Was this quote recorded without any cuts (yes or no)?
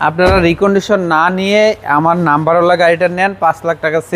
yes